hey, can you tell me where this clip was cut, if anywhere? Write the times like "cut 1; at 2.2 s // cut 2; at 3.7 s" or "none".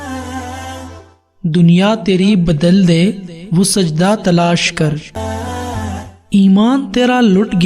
cut 1; at 5.2 s